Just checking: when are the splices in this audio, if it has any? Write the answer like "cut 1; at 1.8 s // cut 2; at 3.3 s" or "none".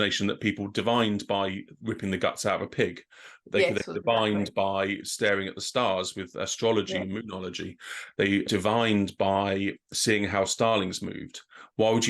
cut 1; at 1.8 s // cut 2; at 8.5 s